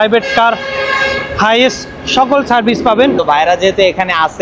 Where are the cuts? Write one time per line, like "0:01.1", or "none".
0:03.2